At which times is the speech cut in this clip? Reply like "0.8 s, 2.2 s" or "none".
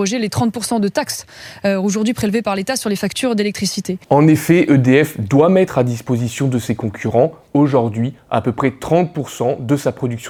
none